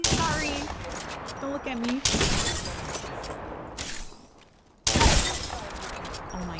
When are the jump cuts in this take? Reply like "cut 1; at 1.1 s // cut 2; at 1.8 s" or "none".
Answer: none